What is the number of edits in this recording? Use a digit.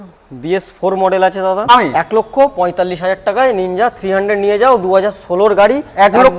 1